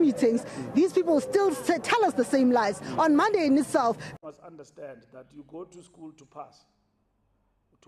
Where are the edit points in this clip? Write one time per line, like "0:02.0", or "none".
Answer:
0:04.0